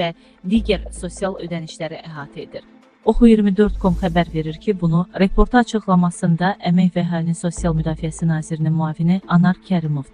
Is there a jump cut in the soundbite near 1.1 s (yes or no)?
no